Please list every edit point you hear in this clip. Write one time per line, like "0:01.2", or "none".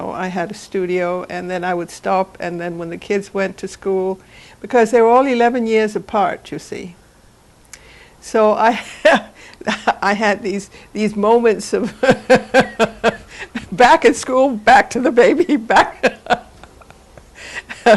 0:01.3

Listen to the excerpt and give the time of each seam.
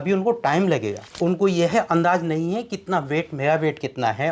0:01.1

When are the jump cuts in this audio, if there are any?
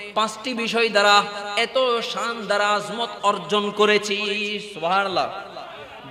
none

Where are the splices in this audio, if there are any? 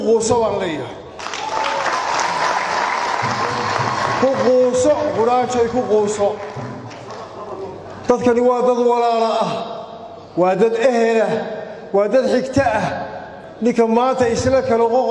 none

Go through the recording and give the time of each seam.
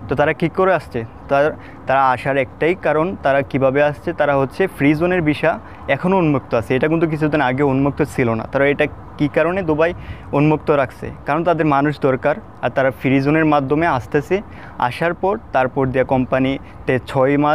none

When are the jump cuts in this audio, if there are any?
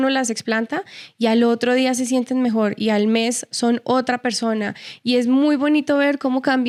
none

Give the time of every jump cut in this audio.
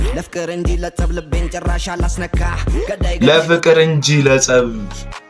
none

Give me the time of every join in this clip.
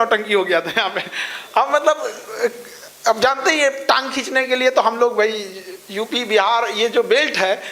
none

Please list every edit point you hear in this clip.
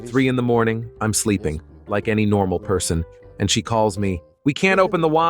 0:04.3

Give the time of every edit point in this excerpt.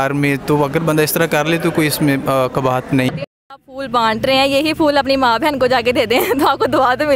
0:03.1

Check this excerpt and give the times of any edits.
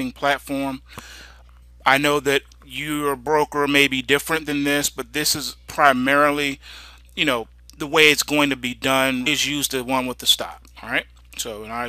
none

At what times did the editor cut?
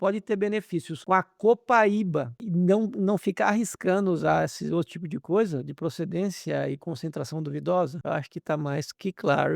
0:00.9
0:02.4
0:08.0

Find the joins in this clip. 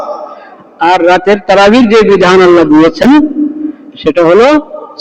none

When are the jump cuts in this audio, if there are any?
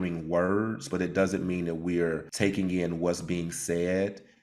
0:02.3

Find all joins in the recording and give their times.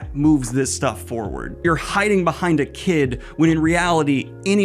0:01.6

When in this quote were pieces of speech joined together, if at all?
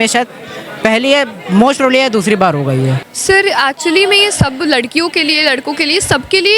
0:03.1

